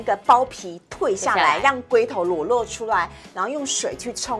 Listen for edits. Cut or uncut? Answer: uncut